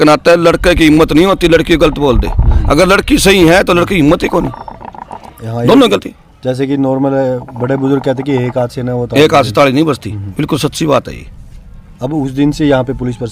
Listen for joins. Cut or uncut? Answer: uncut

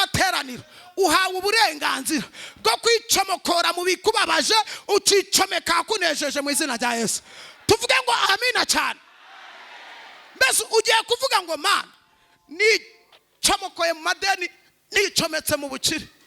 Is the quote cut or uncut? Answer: uncut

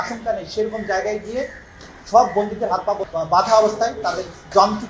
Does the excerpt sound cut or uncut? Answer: cut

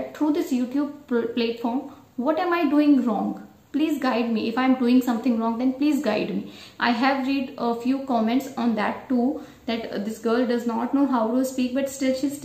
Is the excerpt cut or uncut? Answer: uncut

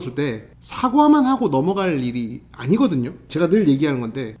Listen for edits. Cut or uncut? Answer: uncut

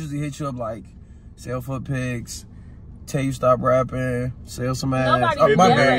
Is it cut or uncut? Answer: uncut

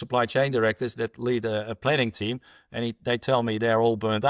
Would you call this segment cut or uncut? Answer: uncut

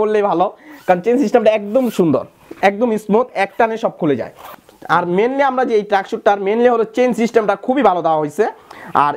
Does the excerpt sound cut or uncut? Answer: uncut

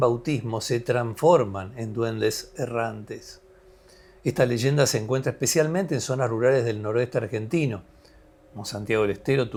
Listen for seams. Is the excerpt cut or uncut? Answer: uncut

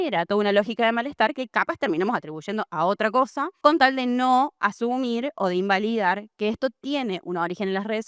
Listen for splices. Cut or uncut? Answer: uncut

